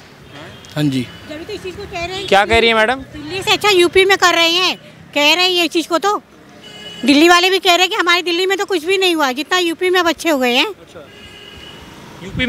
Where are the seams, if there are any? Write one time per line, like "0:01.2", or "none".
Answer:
none

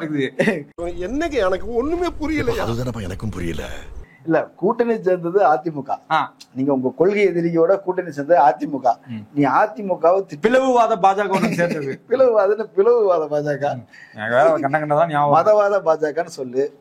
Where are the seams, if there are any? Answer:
none

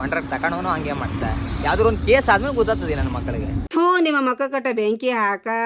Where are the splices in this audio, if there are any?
none

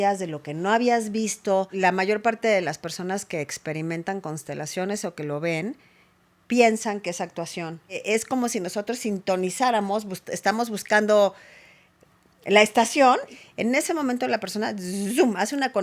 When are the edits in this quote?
0:01.7
0:08.0
0:13.4

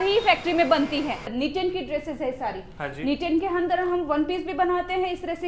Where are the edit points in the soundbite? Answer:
0:01.3

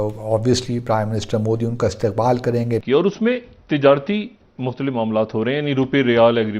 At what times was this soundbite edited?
0:02.8

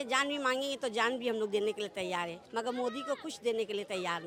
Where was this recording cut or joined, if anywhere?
none

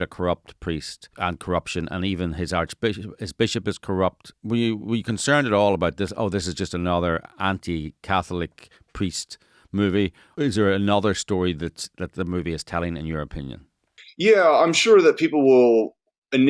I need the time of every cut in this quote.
0:01.1
0:04.3
0:10.2

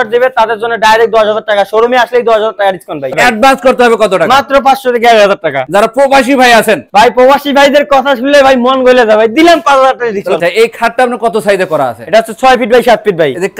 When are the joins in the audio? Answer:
0:03.1
0:05.7
0:10.4

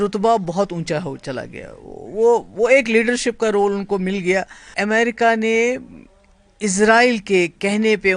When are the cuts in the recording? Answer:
0:04.7

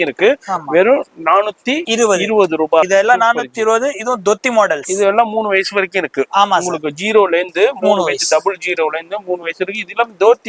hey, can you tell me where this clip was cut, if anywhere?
0:02.9

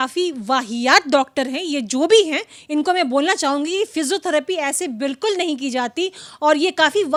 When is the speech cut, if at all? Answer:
none

